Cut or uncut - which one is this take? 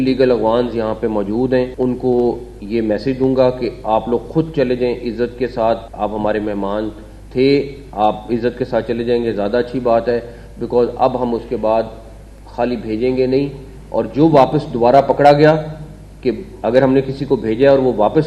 cut